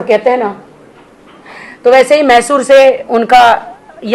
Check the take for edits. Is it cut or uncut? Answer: uncut